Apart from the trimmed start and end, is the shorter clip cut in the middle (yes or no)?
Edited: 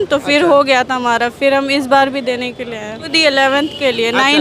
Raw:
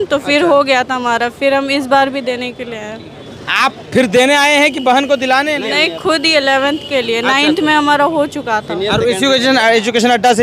yes